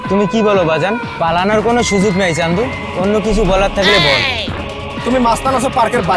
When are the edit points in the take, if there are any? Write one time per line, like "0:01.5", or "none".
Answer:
0:01.1
0:04.4